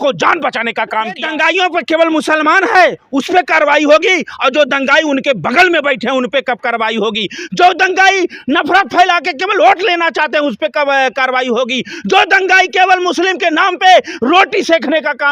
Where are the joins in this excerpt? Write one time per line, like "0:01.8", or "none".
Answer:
0:01.2